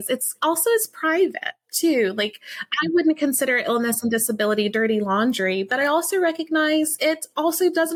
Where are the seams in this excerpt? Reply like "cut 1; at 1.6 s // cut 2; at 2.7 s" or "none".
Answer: none